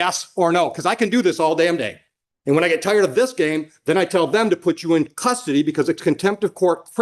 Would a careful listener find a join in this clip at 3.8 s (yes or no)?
no